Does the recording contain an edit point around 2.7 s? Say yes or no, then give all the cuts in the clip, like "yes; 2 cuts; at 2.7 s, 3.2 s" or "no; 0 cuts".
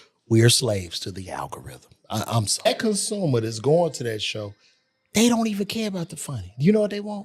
yes; 1 cut; at 2.7 s